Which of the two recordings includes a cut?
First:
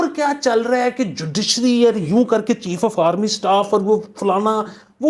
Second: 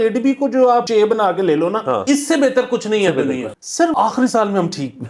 second; 3 cuts; at 0.9 s, 2.0 s, 3.6 s

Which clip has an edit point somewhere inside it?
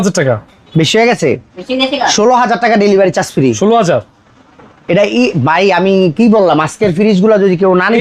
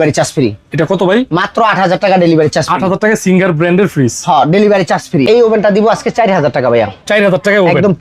second; 1 cut; at 5.3 s

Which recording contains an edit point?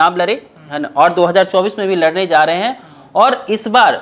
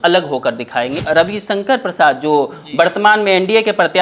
second; 1 cut; at 1.0 s

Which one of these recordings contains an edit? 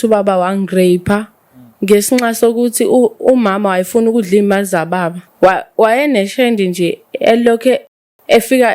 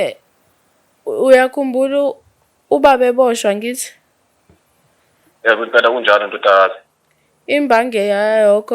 first; 1 cut; at 5.3 s

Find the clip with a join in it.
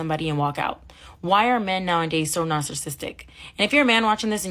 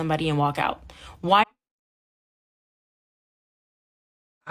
first; 1 cut; at 1.5 s

